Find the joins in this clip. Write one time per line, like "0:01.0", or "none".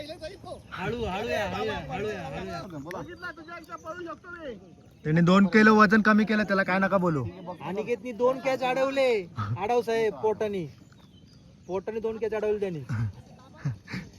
0:02.6